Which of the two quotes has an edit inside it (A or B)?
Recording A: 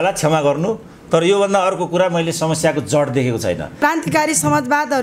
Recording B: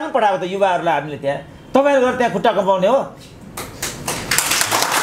A